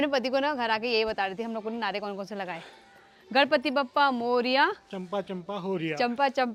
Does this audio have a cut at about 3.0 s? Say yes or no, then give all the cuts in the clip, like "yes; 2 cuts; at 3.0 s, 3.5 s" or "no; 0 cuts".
no; 0 cuts